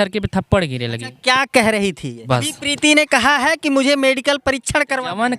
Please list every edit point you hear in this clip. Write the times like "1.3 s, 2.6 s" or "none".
2.1 s